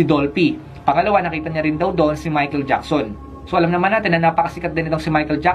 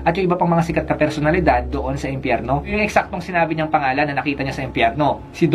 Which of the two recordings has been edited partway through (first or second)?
second